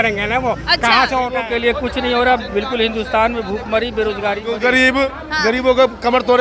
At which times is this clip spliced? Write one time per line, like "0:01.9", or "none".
0:01.4
0:04.5